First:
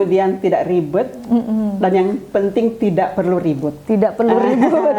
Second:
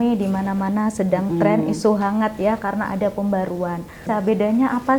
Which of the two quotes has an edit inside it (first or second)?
second